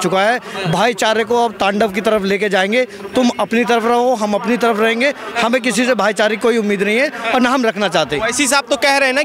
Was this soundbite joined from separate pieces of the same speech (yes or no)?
no